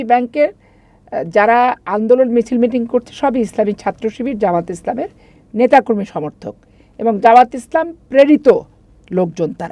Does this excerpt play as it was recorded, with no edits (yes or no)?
yes